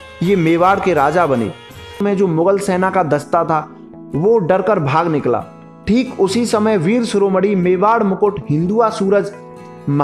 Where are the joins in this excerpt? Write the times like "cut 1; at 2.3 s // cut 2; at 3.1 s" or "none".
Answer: cut 1; at 2.0 s